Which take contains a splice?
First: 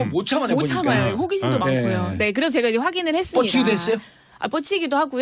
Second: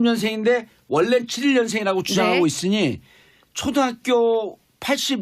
second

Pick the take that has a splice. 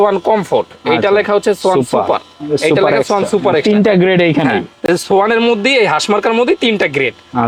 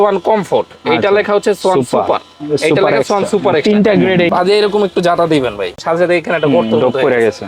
second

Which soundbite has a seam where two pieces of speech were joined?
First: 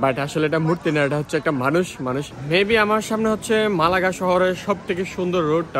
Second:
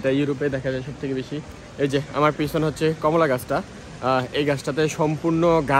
first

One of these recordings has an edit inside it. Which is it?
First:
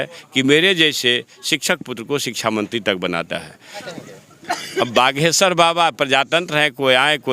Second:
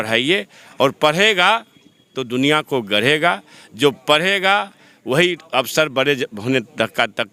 first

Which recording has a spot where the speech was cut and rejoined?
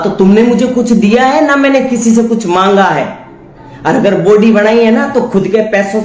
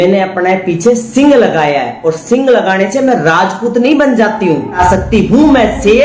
second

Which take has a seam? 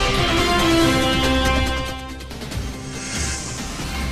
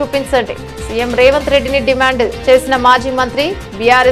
first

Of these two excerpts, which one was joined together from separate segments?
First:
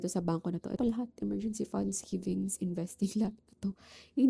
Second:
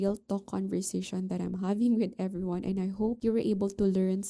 second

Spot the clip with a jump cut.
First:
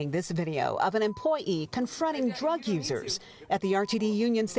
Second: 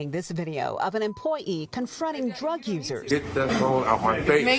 second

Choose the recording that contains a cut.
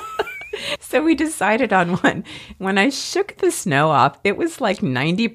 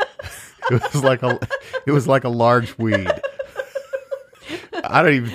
second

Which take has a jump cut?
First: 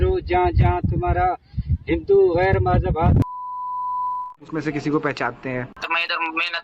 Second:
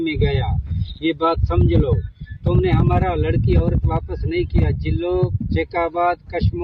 first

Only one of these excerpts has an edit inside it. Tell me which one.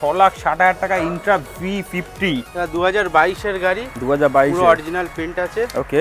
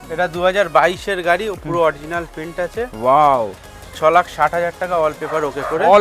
first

